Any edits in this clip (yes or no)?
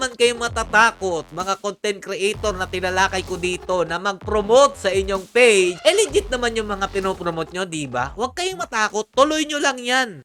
no